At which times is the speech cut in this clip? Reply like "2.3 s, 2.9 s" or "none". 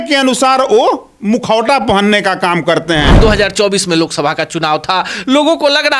1.1 s, 3.2 s